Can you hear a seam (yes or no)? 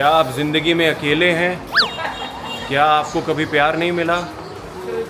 no